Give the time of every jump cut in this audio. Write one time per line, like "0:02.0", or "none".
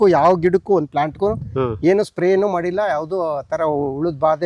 none